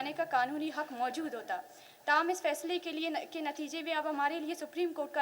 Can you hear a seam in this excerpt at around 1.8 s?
no; 0 cuts

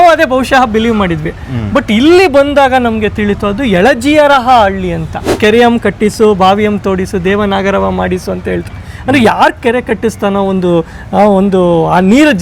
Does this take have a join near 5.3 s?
yes; 1 cut; at 5.3 s

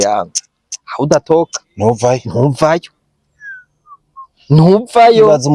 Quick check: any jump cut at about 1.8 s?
no; 0 cuts

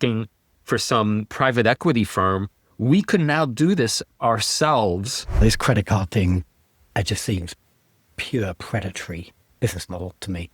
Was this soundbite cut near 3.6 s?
no; 3 cuts; at 1.3 s, 5.4 s, 9.4 s

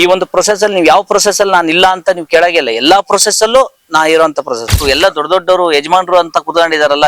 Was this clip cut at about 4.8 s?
yes; 1 cut; at 4.8 s

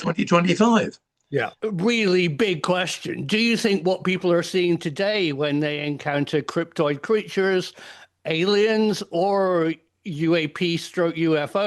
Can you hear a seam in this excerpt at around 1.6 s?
yes; 1 cut; at 1.6 s

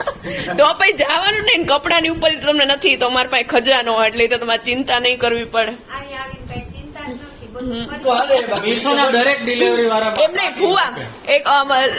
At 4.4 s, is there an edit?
no; 1 cut; at 8.0 s

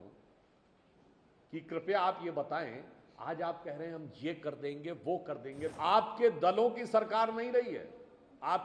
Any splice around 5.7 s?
yes; 1 cut; at 5.7 s

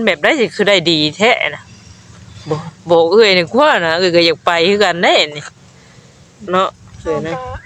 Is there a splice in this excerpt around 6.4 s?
yes; 1 cut; at 6.4 s

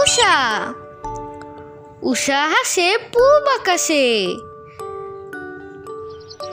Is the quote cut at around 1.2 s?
no; 1 cut; at 4.6 s

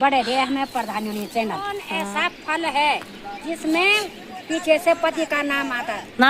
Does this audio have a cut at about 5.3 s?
no; 1 cut; at 1.8 s

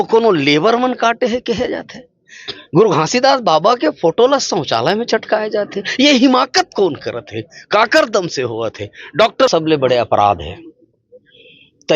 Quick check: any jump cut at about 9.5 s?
yes; 1 cut; at 9.5 s

